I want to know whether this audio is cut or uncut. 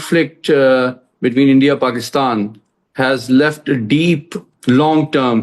cut